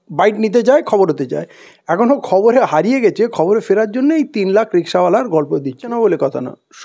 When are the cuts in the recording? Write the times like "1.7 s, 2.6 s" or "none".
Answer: 5.9 s